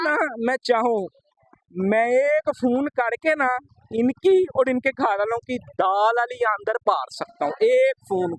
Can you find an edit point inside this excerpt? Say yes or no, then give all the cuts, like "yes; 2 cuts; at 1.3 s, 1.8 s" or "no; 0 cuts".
no; 0 cuts